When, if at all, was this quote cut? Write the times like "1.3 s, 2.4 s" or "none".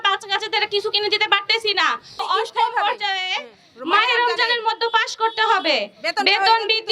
2.2 s

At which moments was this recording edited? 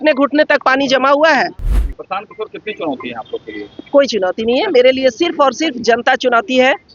1.7 s

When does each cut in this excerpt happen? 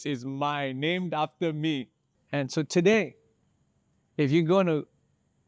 2.2 s

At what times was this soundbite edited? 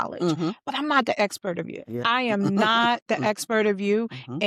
1.8 s

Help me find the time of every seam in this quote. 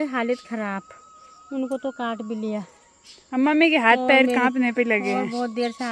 none

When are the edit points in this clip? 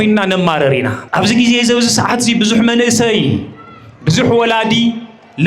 1.0 s

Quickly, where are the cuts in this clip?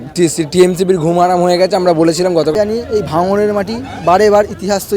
2.5 s

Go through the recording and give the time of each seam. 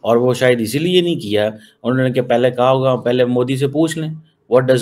none

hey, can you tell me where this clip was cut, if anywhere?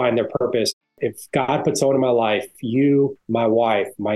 0.8 s, 3.2 s

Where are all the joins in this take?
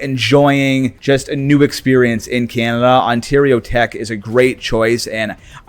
0.9 s

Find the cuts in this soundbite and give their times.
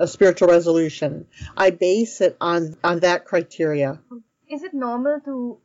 2.7 s

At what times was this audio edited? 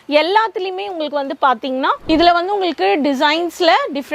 2.0 s

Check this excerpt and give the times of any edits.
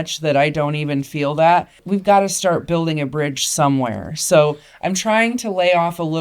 1.8 s

